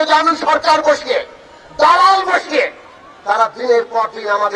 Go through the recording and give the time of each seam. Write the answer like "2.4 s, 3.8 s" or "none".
none

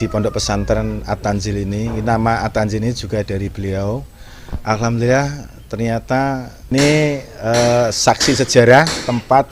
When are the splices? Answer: 6.7 s

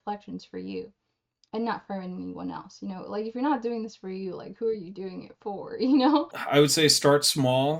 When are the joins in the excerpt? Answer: 6.4 s

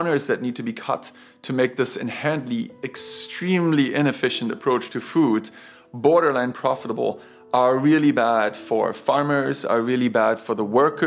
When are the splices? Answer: none

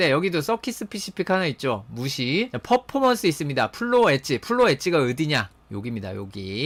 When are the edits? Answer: none

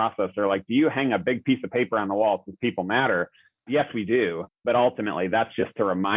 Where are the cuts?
3.7 s

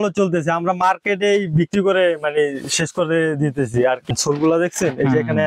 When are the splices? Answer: 4.1 s

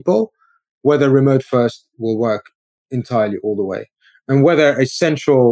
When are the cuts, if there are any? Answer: none

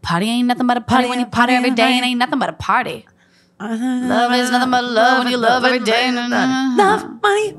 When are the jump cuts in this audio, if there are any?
none

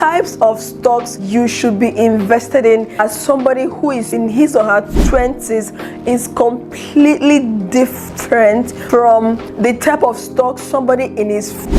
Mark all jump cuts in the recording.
1.1 s

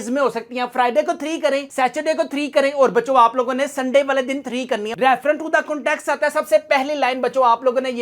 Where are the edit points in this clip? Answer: 4.9 s

